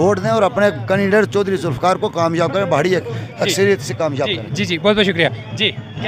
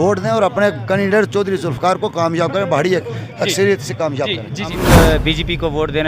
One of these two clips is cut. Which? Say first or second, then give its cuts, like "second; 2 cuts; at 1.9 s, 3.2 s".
second; 1 cut; at 4.7 s